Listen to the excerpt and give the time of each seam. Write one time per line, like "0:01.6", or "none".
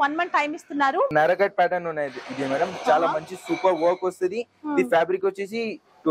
0:01.1

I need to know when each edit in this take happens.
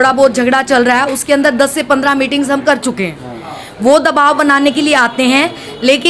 none

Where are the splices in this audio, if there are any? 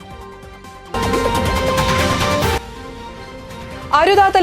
0:00.9

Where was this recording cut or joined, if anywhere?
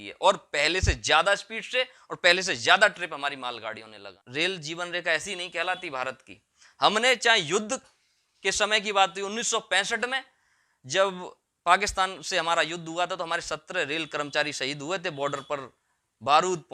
0:04.2

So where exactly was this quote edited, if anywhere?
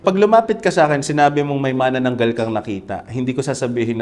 none

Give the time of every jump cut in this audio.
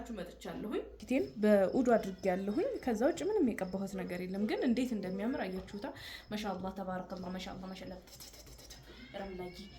0:01.0

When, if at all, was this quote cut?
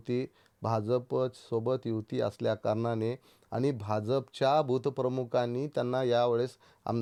none

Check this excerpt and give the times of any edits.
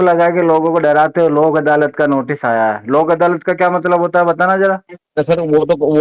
0:04.9

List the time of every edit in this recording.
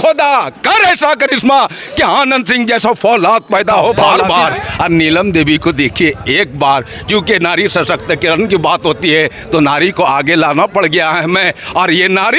0:04.1

